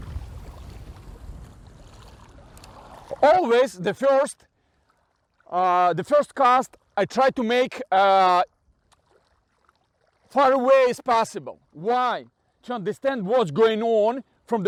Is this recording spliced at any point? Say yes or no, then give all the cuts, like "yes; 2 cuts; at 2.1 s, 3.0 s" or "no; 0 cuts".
no; 0 cuts